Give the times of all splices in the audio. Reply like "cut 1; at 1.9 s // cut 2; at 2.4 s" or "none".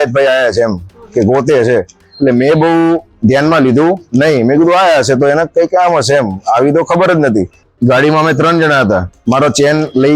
cut 1; at 7.6 s